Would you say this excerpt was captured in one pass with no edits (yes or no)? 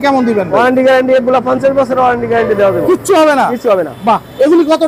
yes